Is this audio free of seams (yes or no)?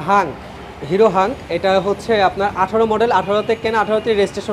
yes